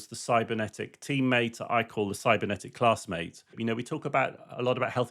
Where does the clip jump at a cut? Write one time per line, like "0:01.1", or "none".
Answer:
0:03.5